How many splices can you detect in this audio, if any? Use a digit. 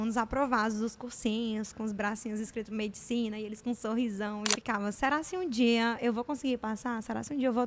1